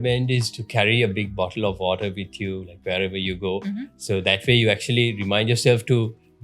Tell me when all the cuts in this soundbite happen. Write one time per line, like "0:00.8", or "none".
none